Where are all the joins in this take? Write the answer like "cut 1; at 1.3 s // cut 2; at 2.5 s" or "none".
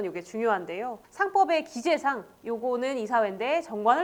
cut 1; at 1.0 s